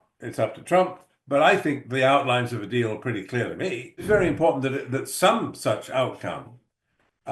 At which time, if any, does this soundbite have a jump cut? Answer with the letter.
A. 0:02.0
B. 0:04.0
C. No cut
B